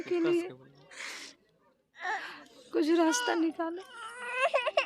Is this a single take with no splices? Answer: yes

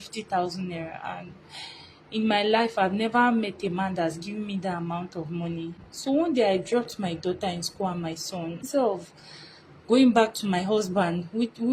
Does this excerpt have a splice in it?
yes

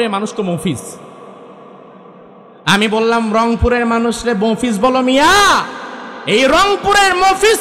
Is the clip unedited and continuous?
yes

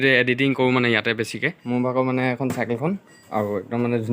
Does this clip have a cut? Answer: yes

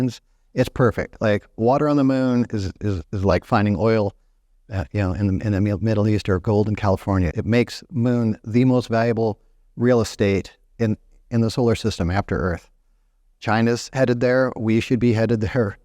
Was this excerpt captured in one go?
no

